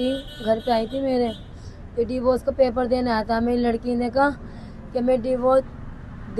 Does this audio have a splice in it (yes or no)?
no